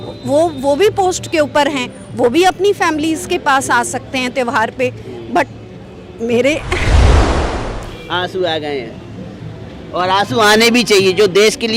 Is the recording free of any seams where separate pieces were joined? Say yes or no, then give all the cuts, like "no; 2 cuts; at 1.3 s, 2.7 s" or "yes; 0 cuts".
yes; 0 cuts